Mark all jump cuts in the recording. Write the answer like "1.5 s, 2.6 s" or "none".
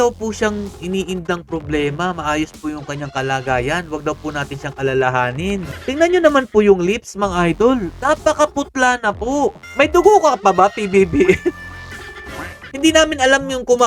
5.7 s, 9.6 s, 12.7 s